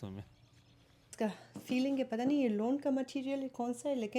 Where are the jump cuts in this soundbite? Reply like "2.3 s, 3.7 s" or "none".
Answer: 1.1 s